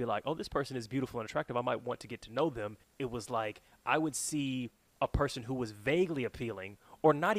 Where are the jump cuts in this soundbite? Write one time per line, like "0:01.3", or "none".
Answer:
0:02.8
0:04.8